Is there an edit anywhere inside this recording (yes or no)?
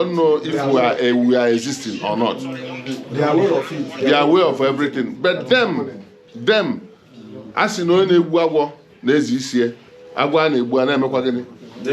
no